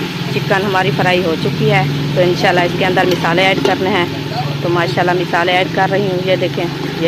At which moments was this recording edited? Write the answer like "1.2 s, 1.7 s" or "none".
none